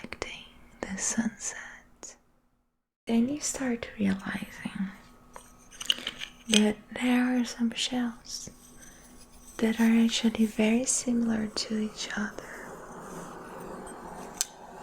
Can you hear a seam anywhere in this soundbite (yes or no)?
yes